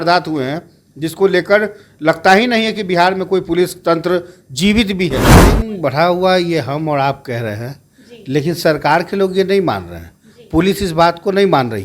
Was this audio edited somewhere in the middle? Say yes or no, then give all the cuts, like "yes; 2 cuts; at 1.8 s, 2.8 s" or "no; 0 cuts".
yes; 1 cut; at 5.3 s